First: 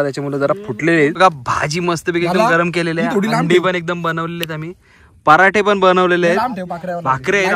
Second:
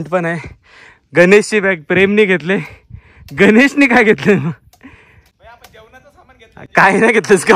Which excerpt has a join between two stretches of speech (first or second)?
first